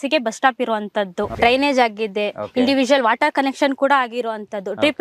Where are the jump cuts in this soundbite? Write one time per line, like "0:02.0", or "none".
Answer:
0:01.3